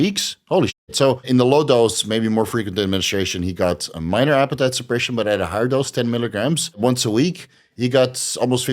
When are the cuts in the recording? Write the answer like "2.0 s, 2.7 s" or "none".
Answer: 1.2 s, 6.8 s